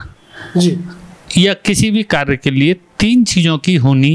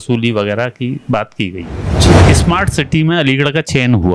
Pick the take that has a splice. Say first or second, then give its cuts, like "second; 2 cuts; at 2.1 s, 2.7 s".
second; 1 cut; at 2.2 s